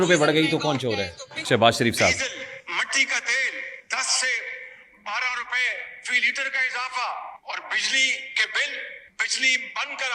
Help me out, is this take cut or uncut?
cut